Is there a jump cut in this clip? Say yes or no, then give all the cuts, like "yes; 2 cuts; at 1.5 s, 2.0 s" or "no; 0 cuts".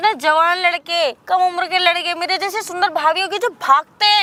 no; 0 cuts